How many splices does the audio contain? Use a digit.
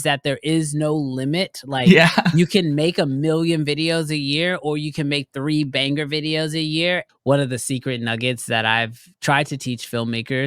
1